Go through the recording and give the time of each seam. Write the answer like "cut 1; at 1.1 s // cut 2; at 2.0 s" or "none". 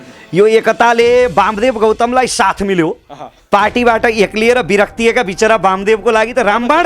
none

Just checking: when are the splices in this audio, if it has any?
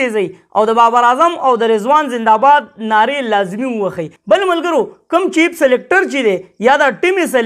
cut 1; at 4.1 s

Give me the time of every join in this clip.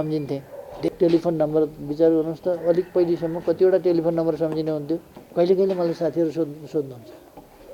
cut 1; at 0.9 s // cut 2; at 5.2 s

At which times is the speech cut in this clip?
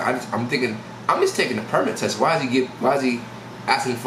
none

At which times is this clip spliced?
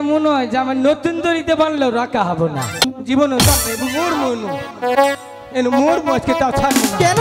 cut 1; at 2.9 s

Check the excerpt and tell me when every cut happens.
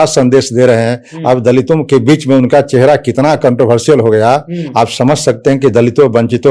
none

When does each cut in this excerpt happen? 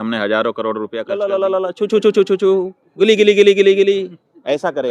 cut 1; at 1.1 s

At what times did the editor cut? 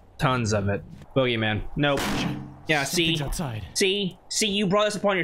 cut 1; at 1.0 s

